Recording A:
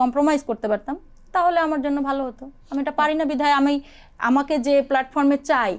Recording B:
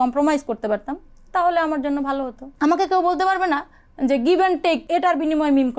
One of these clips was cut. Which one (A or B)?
B